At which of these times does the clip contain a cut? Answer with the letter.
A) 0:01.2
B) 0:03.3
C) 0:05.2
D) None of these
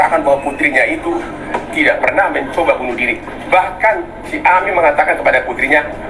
D